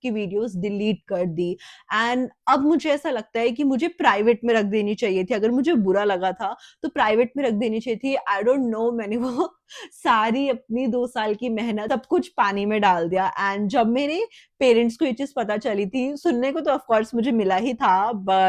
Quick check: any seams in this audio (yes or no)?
no